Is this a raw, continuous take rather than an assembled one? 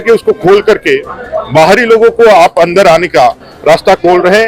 yes; 0 cuts

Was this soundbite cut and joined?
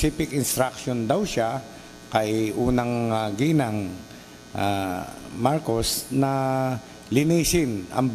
no; 0 cuts

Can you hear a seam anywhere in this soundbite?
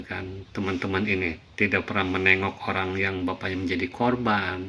no; 0 cuts

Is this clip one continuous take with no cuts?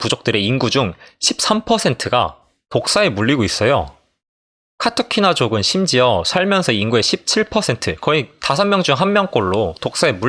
yes; 0 cuts

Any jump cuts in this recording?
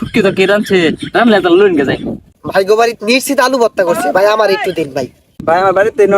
yes; 2 cuts; at 2.1 s, 5.2 s

